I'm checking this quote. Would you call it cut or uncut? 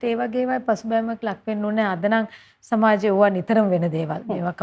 uncut